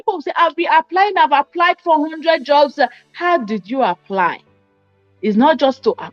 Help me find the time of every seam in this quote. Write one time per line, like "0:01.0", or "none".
none